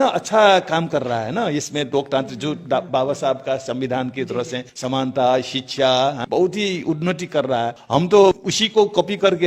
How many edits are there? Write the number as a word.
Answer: four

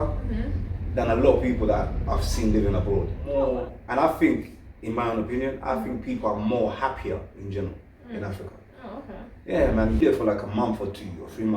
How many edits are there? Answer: two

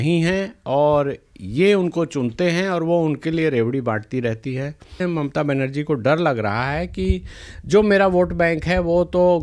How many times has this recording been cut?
one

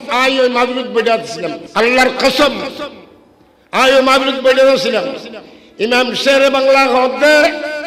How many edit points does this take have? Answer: one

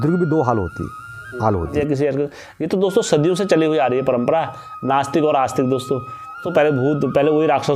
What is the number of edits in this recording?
two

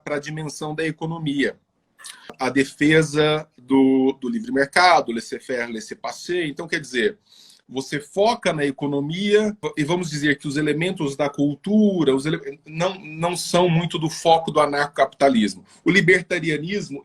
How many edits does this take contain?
two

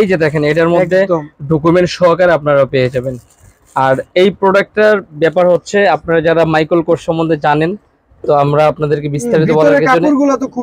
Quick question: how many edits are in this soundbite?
zero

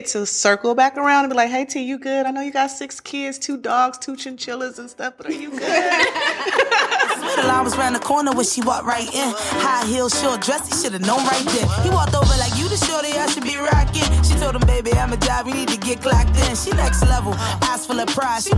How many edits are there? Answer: one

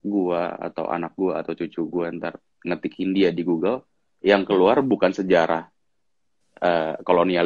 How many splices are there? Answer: zero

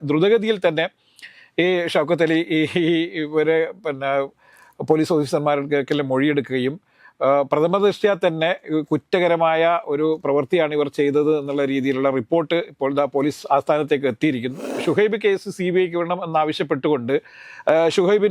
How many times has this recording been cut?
one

